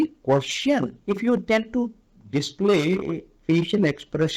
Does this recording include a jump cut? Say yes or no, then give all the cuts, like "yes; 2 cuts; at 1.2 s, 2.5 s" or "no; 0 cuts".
no; 0 cuts